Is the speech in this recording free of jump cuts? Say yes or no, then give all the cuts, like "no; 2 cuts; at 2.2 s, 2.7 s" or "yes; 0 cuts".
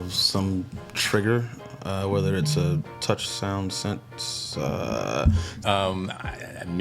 no; 1 cut; at 5.5 s